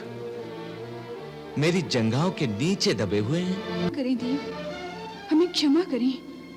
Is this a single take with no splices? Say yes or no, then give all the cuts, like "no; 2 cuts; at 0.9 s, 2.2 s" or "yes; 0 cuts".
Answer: no; 1 cut; at 3.9 s